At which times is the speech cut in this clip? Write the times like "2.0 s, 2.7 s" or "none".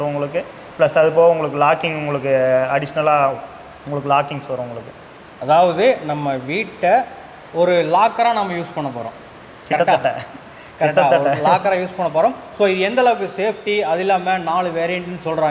none